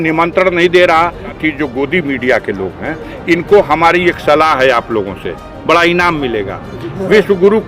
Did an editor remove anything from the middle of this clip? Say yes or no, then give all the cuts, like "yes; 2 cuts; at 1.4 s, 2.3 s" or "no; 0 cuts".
yes; 1 cut; at 1.4 s